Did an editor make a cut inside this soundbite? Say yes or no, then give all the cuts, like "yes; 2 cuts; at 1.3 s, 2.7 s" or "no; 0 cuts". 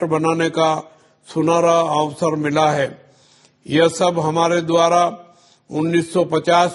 no; 0 cuts